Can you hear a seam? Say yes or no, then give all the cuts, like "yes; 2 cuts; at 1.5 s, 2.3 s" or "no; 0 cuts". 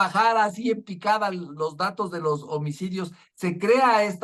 no; 0 cuts